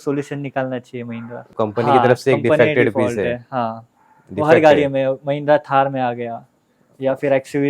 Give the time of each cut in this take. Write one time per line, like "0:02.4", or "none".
none